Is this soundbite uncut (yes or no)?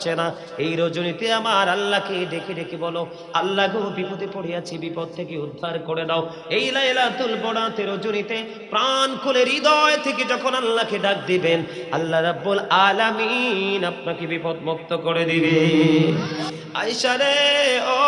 no